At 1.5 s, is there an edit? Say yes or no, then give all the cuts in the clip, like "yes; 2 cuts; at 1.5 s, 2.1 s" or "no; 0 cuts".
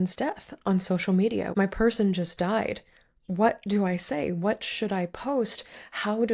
yes; 1 cut; at 1.5 s